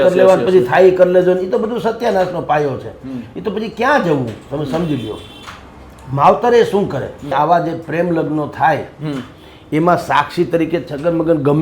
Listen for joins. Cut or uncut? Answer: cut